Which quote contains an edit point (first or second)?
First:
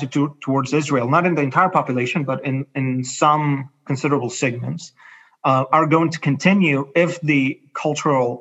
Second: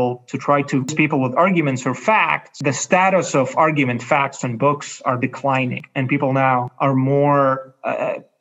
second